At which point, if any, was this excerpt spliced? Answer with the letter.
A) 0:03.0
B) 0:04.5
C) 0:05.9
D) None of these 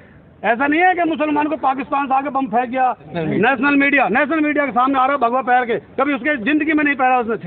A